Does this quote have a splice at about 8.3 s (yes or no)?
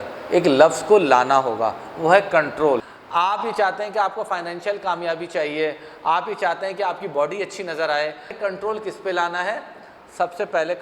yes